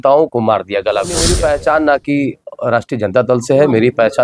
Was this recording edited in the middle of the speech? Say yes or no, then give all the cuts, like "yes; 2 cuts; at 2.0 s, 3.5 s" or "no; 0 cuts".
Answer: yes; 1 cut; at 1.3 s